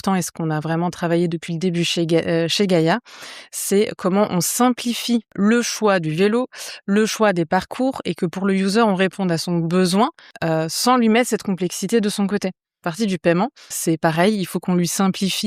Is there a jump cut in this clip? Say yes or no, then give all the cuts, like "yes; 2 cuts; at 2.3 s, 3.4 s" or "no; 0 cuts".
yes; 4 cuts; at 5.3 s, 10.3 s, 12.9 s, 13.7 s